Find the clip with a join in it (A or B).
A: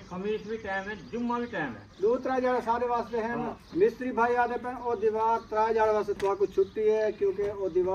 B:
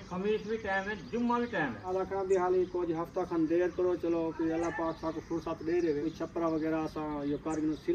B